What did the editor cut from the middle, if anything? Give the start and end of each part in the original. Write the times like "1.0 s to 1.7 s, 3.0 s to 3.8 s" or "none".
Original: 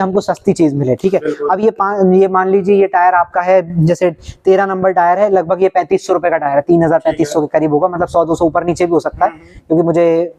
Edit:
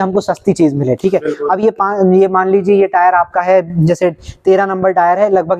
none

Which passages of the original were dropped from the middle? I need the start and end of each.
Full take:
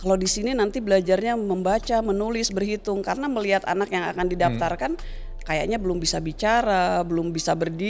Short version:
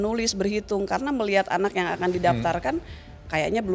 none

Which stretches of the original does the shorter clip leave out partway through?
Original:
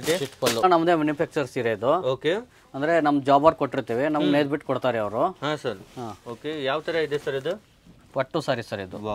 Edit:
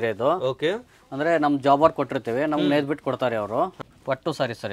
5.4 s to 7.8 s

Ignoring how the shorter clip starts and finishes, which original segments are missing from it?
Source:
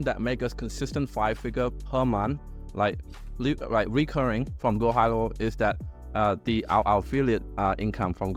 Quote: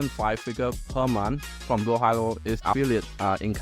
2.5 s to 4.5 s, 5.6 s to 7.0 s

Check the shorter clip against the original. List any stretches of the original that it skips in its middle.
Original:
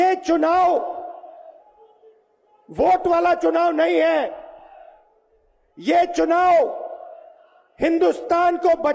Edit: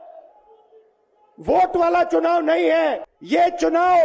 4.4 s to 5.7 s

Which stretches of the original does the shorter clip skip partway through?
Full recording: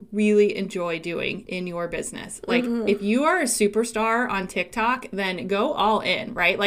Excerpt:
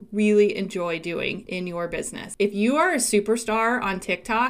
2.4 s to 2.8 s

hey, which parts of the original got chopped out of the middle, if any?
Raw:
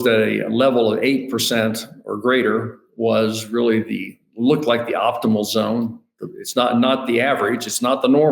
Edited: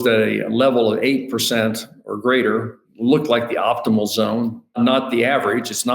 2.8 s to 4.2 s, 6.1 s to 6.7 s

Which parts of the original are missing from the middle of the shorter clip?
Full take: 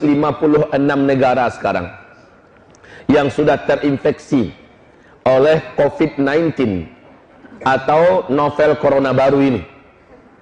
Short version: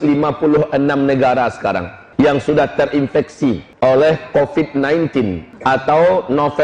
2.0 s to 2.9 s, 4.6 s to 5.1 s, 6.9 s to 7.5 s

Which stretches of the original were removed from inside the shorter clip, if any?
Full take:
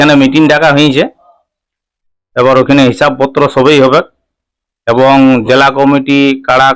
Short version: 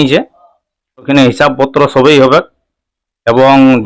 1.9 s to 2.7 s

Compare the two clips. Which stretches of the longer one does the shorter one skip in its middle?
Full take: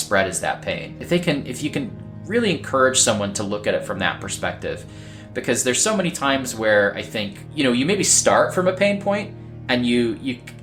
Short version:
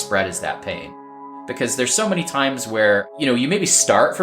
1.0 s to 4.8 s, 7.0 s to 7.5 s

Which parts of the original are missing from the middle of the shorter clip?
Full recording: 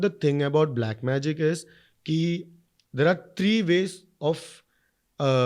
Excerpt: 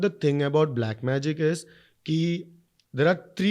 none

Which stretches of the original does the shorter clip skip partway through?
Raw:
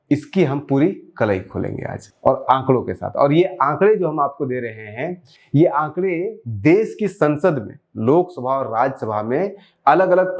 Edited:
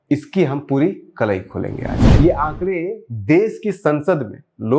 2.0 s to 5.3 s

